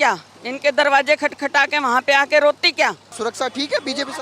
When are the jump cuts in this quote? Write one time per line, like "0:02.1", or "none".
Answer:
0:03.1

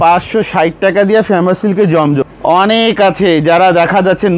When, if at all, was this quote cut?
0:02.3

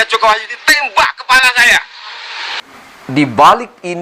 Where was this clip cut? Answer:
0:02.6

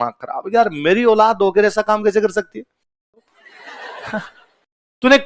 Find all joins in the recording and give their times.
0:03.3

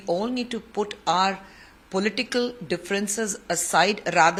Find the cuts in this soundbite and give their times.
none

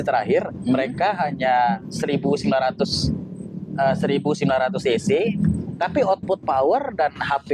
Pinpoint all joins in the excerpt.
none

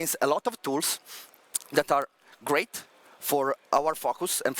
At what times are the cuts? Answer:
0:03.6

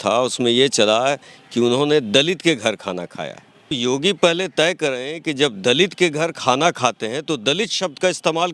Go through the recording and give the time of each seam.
0:03.7

